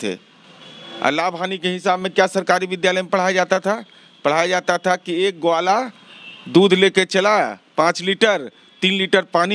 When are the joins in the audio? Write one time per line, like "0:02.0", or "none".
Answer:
none